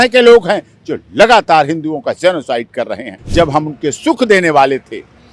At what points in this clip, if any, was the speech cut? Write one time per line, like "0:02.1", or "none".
0:03.2

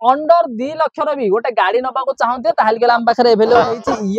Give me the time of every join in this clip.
none

